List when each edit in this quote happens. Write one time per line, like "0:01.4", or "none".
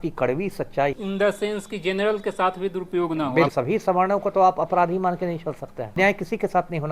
0:00.9
0:03.5
0:06.0